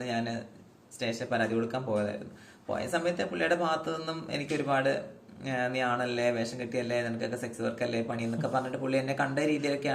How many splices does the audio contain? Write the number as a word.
zero